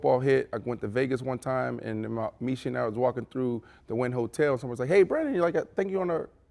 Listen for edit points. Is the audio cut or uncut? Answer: uncut